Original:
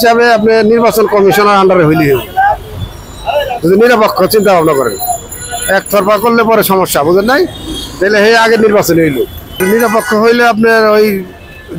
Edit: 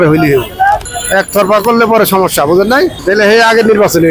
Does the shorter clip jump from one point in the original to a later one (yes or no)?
yes